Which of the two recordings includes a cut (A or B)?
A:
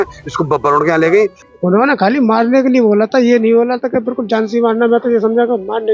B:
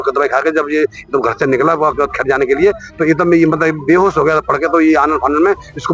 A